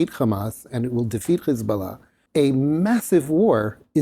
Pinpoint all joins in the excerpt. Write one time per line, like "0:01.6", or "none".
0:02.1